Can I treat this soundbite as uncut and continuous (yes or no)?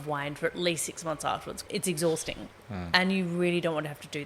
no